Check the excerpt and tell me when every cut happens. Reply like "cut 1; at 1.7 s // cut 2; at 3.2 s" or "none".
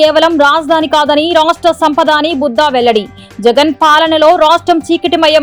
none